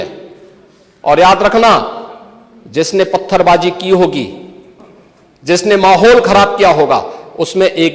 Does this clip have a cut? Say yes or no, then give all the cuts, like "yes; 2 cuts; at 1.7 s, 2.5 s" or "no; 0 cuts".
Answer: no; 0 cuts